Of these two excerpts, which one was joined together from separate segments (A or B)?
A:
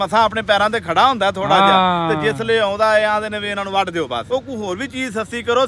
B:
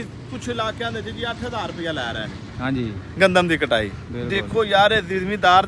A